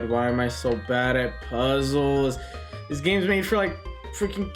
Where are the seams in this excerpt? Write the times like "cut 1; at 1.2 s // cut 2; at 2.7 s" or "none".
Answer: none